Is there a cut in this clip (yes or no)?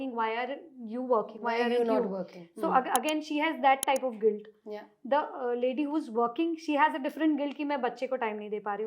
no